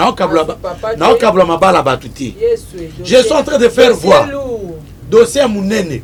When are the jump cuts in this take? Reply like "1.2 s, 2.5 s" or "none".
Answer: none